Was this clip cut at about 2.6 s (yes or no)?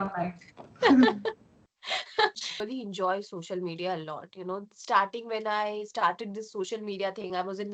yes